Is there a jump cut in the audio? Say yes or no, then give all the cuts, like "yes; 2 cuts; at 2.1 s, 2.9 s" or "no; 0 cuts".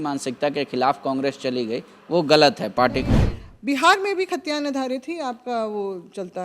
yes; 1 cut; at 3.2 s